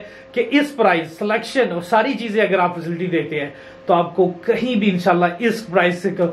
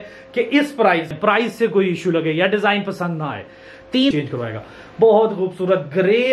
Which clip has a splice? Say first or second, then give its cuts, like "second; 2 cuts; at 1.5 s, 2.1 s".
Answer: second; 2 cuts; at 1.1 s, 4.1 s